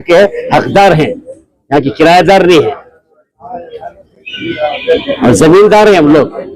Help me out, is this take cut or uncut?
uncut